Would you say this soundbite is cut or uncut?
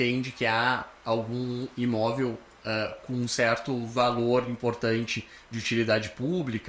uncut